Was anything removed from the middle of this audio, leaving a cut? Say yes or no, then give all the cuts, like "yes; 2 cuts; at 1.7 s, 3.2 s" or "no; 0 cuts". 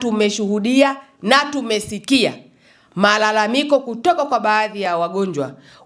no; 0 cuts